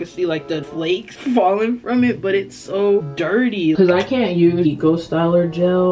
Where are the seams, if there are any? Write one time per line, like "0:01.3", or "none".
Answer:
0:00.8
0:03.8
0:04.7